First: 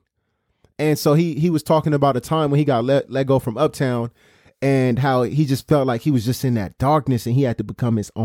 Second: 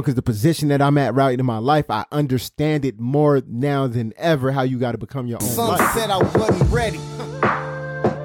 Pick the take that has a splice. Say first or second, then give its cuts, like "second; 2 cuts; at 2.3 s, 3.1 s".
second; 1 cut; at 5.4 s